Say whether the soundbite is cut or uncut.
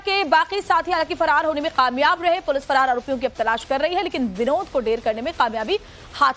uncut